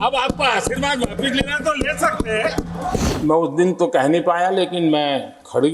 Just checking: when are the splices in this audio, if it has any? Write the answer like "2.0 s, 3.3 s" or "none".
3.1 s